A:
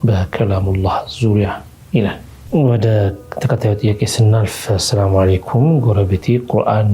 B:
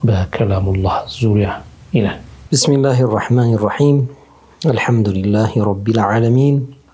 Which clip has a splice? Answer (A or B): A